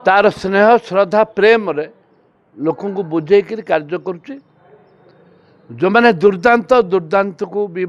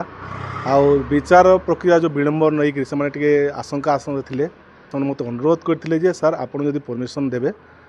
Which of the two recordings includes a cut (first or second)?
second